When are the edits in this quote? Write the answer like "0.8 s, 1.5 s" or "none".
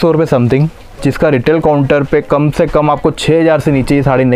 none